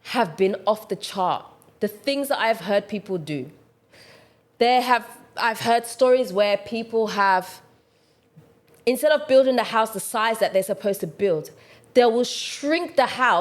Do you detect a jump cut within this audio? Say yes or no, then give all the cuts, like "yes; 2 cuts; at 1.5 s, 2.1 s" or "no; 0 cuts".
no; 0 cuts